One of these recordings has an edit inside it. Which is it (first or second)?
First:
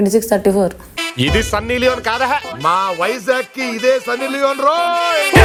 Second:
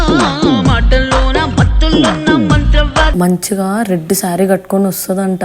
second